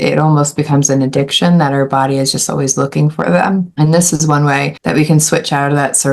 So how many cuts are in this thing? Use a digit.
2